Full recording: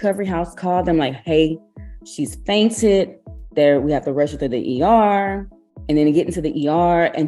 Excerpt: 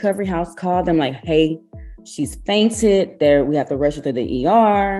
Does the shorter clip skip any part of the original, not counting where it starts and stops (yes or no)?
yes